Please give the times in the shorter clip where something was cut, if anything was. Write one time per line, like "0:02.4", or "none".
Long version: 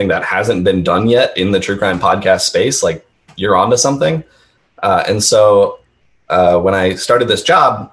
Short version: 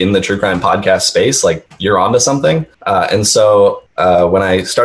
0:01.7
0:02.7
0:03.9